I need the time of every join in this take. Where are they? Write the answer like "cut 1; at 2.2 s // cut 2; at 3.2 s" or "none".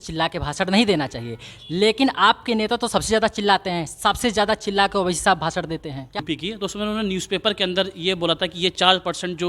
cut 1; at 6.2 s